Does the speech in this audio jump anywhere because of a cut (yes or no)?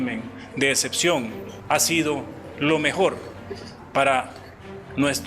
yes